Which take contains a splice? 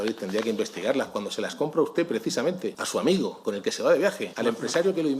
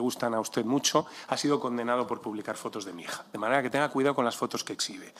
first; 3 cuts; at 2.8 s, 3.4 s, 4.3 s

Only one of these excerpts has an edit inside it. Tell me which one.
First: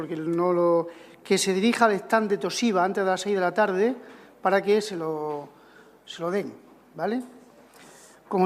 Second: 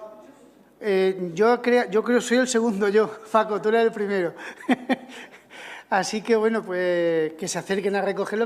second; 1 cut; at 1.7 s

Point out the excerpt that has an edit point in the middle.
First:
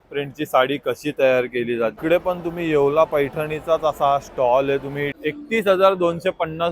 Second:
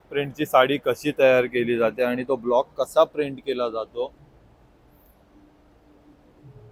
first; 2 cuts; at 2.0 s, 5.1 s

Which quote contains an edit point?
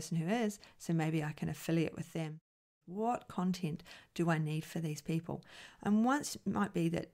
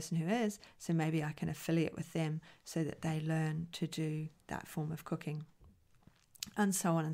first; 1 cut; at 2.6 s

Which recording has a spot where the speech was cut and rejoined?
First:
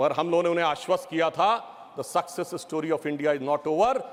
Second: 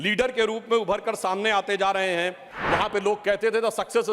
second; 1 cut; at 2.5 s

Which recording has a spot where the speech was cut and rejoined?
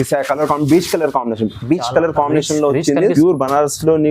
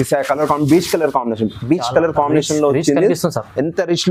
first; 1 cut; at 3.1 s

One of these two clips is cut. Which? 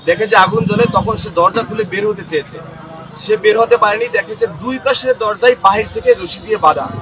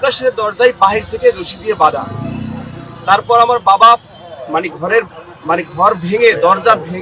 second; 1 cut; at 4.1 s

